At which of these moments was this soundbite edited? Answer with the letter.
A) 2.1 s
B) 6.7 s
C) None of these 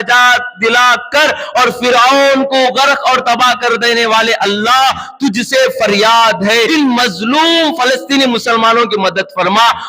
B